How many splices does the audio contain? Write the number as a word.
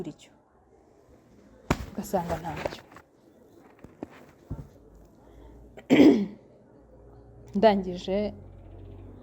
zero